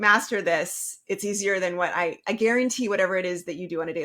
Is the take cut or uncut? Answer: uncut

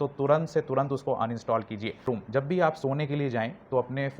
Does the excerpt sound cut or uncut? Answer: cut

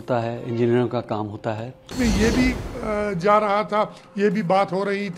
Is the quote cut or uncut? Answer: cut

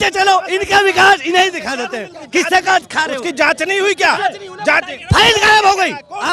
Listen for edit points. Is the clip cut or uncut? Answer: cut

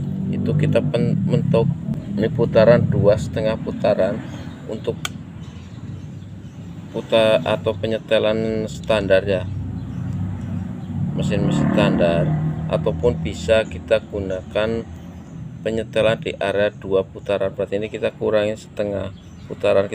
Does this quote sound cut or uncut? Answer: cut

